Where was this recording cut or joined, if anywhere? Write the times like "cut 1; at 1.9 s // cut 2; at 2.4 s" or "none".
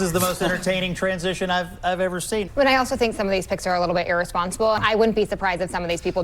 cut 1; at 2.5 s // cut 2; at 4.8 s